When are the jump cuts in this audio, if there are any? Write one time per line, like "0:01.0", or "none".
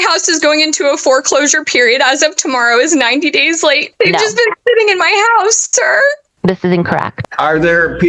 0:03.9
0:07.1